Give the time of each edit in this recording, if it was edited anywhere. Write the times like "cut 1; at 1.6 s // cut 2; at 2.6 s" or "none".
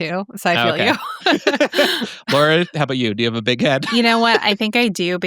cut 1; at 3.9 s